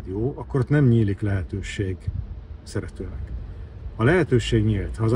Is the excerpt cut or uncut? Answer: uncut